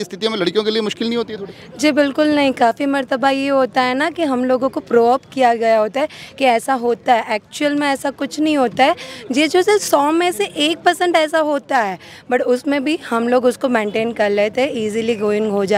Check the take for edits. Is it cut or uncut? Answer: uncut